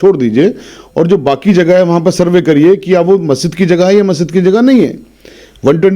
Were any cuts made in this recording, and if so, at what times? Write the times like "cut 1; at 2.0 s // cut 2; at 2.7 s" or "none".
none